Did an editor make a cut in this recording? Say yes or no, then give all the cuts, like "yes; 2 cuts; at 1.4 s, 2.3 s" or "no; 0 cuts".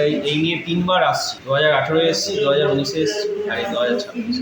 yes; 1 cut; at 1.3 s